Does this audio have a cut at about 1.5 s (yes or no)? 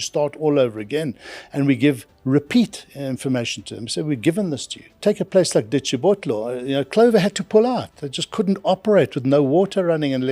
no